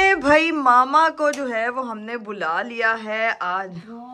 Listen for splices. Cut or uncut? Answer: uncut